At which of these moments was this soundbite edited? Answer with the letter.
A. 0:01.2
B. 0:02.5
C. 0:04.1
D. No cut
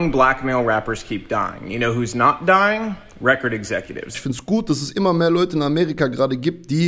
C